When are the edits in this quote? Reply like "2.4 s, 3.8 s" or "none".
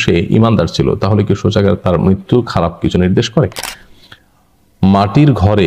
3.8 s